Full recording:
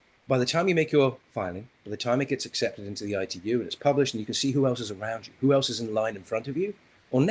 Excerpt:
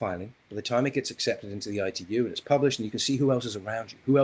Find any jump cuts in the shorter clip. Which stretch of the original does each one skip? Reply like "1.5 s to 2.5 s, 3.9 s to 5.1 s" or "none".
none